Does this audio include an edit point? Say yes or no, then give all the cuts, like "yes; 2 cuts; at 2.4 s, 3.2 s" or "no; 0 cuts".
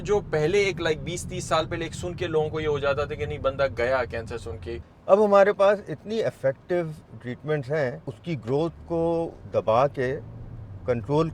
yes; 2 cuts; at 4.8 s, 8.1 s